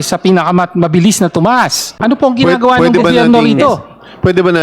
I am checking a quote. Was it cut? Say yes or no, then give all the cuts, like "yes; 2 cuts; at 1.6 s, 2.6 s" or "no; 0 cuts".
yes; 1 cut; at 1.8 s